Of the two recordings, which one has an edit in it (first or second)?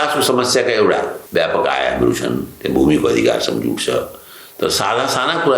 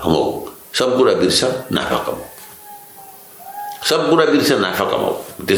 first